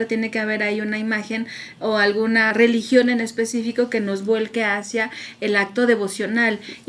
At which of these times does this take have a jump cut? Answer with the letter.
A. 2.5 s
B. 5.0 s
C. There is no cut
A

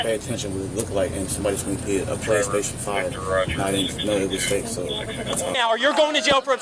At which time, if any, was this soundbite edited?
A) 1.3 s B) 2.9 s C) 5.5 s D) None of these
C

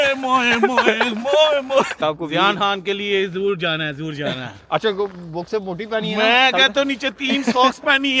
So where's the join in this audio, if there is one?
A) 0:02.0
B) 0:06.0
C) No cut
A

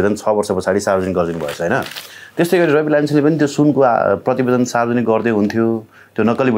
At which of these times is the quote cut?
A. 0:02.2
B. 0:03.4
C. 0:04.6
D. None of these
D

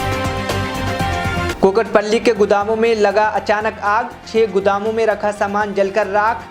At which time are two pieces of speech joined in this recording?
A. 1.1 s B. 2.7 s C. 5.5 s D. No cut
A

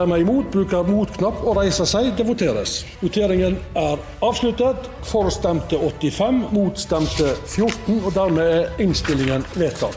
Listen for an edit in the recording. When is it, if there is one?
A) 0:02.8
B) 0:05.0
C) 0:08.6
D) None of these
A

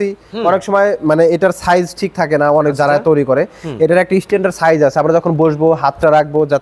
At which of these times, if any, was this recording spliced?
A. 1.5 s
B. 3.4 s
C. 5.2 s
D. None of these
D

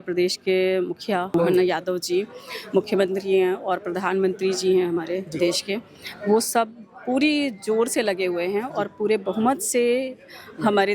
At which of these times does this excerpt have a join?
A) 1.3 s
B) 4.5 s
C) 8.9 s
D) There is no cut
A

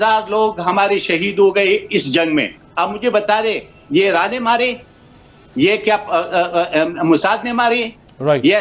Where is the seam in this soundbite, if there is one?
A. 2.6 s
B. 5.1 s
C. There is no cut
A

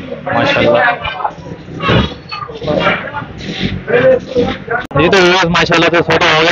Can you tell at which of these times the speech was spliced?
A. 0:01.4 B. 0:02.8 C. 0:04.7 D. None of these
C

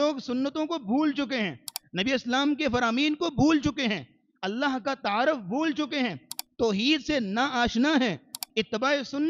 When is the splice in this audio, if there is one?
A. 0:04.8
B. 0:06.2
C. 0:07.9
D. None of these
D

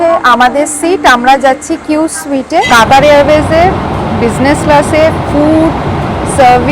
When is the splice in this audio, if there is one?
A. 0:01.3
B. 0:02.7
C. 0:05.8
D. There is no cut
B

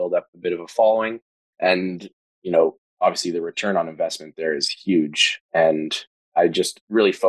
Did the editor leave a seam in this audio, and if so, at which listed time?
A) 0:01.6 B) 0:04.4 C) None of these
A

